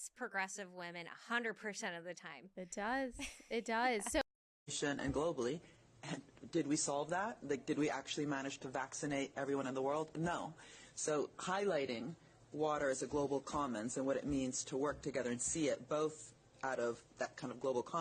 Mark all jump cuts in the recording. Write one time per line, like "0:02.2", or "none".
none

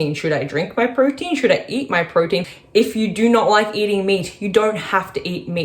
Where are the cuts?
0:02.6

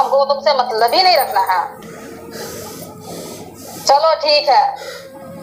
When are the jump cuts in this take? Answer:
none

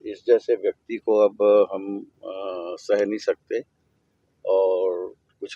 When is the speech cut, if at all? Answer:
none

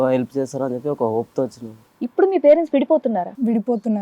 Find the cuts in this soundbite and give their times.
0:01.8

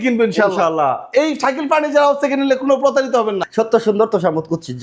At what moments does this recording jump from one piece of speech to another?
0:03.4

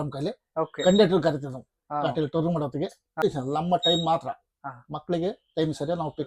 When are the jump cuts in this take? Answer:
0:03.2

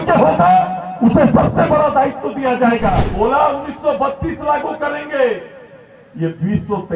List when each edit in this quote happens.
0:03.1

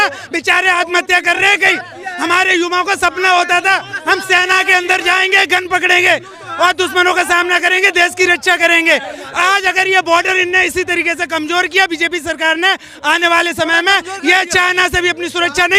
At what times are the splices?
none

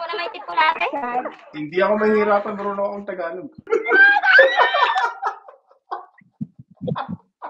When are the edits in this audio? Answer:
0:03.6

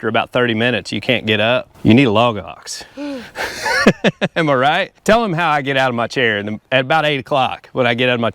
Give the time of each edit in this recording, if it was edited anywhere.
0:01.7
0:04.9
0:06.6

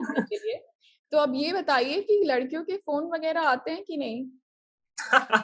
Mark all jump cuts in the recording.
none

